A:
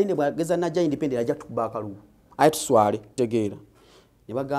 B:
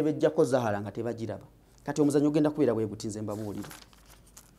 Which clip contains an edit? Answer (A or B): A